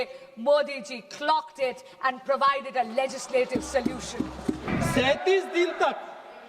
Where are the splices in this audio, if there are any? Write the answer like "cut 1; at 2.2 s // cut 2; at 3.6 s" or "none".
cut 1; at 4.7 s